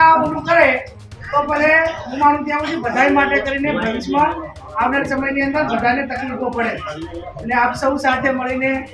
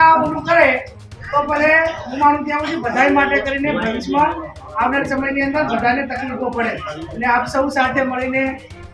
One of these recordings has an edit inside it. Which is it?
second; 1 cut; at 7.0 s

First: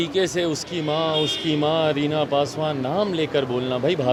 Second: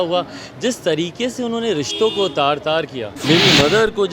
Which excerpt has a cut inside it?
second; 1 cut; at 3.1 s

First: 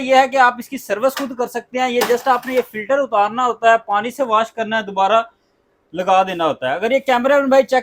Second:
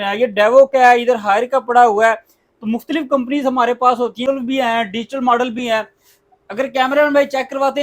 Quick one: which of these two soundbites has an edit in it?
second; 1 cut; at 4.2 s

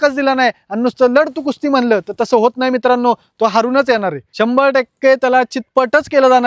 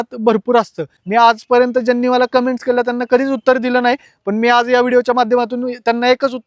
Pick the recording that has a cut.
second; 1 cut; at 0.9 s

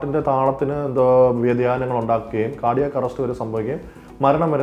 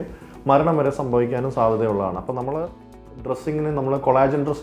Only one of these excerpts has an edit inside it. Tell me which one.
second; 1 cut; at 3.0 s

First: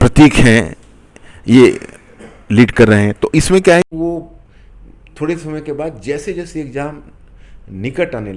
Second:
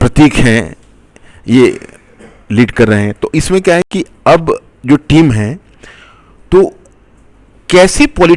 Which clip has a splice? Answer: first; 1 cut; at 3.9 s

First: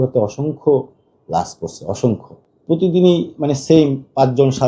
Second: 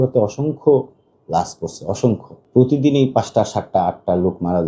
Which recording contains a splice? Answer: first; 1 cut; at 2.3 s

